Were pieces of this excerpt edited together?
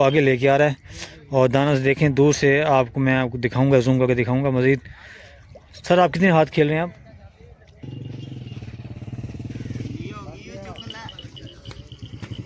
yes; 1 cut; at 7.8 s

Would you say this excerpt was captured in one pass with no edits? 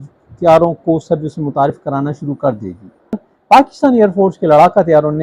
no; 1 cut; at 3.2 s

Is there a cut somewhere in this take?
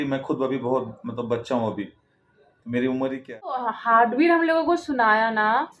yes; 1 cut; at 3.7 s

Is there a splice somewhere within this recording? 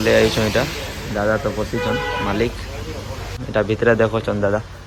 yes; 1 cut; at 3.3 s

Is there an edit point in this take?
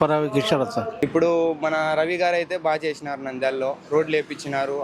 yes; 1 cut; at 0.9 s

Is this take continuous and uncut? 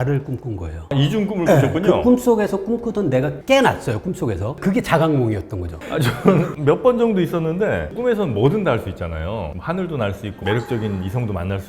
no; 3 cuts; at 0.9 s, 7.9 s, 10.3 s

